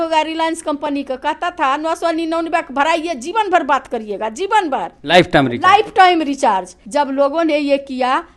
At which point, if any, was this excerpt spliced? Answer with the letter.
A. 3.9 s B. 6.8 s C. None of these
B